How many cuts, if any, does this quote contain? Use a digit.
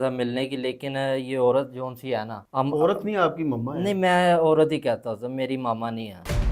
0